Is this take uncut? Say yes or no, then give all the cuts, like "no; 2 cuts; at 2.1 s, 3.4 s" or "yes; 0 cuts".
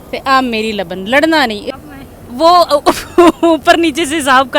no; 1 cut; at 1.8 s